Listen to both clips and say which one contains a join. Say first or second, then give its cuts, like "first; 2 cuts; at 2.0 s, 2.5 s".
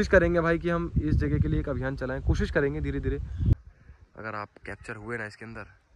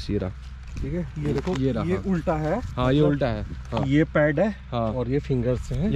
first; 1 cut; at 3.7 s